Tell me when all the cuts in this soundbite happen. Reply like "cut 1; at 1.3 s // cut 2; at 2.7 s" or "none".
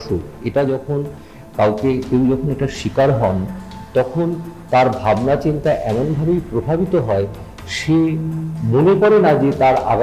none